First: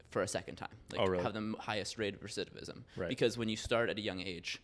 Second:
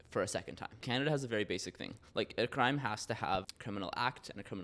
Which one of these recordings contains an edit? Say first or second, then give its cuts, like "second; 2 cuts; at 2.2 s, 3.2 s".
second; 2 cuts; at 0.8 s, 3.5 s